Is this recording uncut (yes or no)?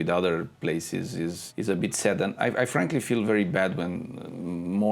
no